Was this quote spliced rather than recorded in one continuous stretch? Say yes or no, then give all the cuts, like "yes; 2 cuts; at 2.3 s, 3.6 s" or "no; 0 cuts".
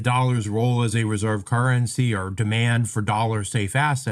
no; 0 cuts